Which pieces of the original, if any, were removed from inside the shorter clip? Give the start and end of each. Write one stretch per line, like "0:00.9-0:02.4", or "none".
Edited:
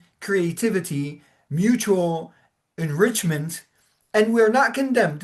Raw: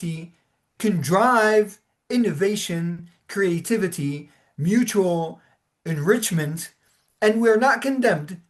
none